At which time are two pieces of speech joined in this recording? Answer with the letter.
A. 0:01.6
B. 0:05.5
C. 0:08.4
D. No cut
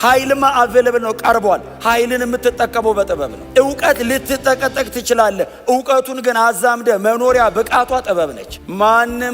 C